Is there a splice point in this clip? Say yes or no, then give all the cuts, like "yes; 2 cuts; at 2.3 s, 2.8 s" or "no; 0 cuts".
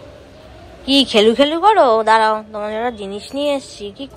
no; 0 cuts